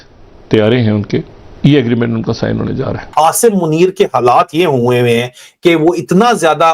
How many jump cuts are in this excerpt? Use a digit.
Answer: 2